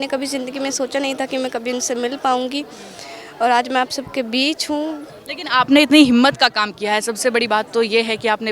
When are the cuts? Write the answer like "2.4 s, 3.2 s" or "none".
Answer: none